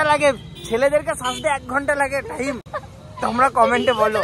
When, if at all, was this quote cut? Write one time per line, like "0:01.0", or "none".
none